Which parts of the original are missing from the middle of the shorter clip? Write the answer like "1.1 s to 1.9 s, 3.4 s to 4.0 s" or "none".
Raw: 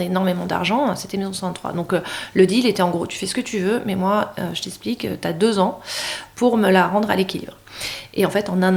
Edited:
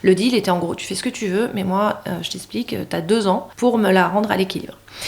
5.8 s to 6.3 s